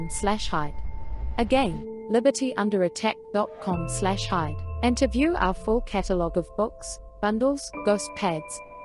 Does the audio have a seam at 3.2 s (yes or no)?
no